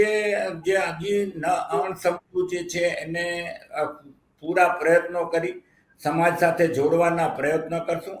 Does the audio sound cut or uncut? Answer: uncut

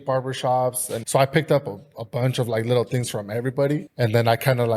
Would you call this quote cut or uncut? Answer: cut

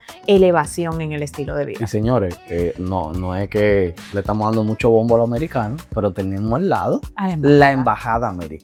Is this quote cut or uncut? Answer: uncut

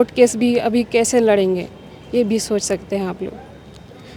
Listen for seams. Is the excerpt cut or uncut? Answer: uncut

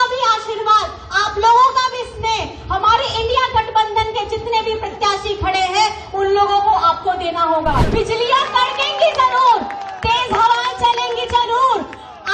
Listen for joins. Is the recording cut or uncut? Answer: cut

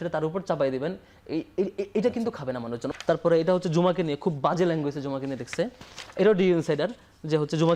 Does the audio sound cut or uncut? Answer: cut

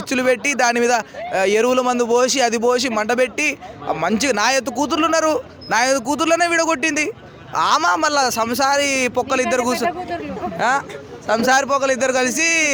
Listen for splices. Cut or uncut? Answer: uncut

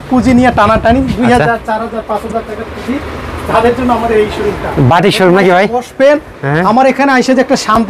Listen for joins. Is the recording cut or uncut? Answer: uncut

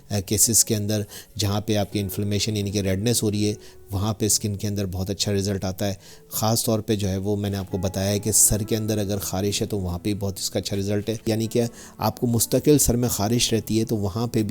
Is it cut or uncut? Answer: cut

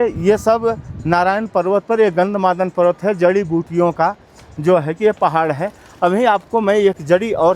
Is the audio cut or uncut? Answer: uncut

